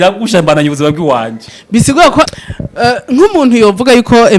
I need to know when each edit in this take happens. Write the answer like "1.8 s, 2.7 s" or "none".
2.3 s